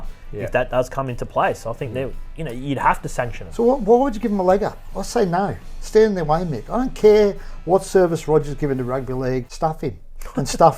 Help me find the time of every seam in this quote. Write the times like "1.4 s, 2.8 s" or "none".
3.4 s, 9.5 s